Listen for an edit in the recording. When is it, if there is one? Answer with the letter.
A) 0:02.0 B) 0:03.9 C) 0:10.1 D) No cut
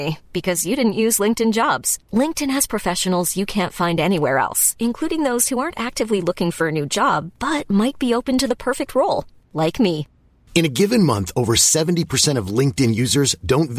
D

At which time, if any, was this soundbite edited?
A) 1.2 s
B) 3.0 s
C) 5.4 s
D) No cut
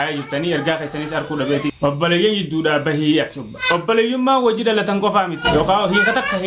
C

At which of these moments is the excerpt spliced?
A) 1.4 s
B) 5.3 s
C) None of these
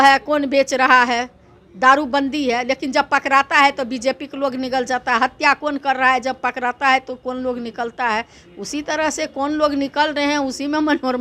C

